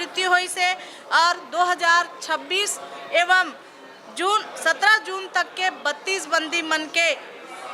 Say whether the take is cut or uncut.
uncut